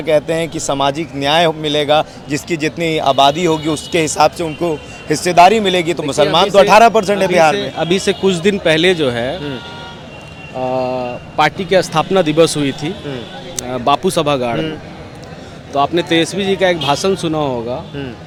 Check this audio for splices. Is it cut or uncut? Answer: uncut